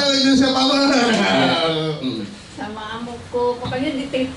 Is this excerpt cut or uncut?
uncut